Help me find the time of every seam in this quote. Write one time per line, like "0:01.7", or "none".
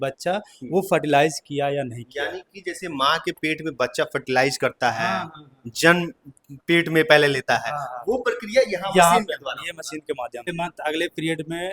0:10.5